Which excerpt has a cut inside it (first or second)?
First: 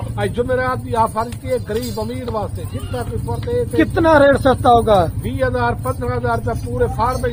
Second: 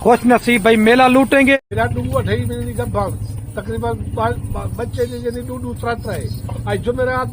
second